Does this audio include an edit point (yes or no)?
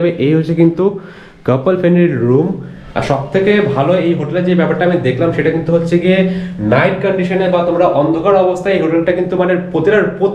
no